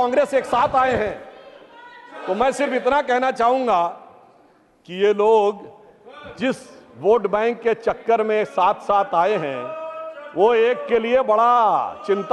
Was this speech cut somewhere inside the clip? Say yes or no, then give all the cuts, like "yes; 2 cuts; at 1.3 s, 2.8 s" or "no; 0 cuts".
no; 0 cuts